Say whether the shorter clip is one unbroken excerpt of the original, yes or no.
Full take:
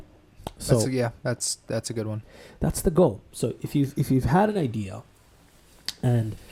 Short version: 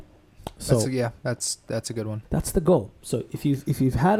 no